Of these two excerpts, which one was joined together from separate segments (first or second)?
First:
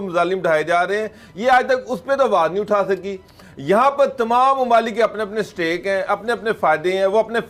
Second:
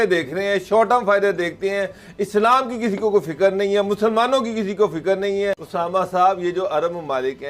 second